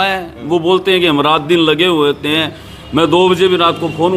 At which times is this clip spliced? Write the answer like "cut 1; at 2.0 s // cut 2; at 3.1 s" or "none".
none